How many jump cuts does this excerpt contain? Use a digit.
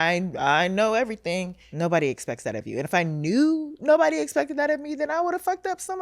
1